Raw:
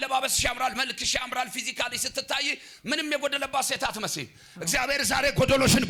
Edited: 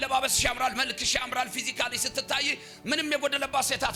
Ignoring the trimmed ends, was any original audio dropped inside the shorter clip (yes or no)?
no